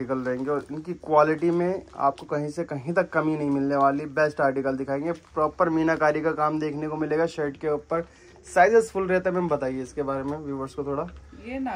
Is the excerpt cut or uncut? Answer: uncut